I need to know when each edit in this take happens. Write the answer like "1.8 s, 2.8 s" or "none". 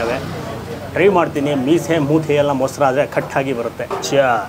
none